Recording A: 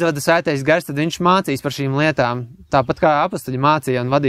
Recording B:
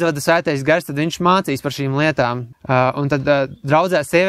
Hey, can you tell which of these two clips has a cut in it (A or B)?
B